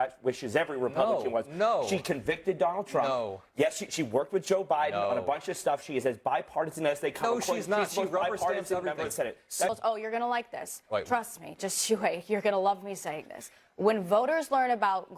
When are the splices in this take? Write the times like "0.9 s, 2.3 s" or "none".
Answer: 9.7 s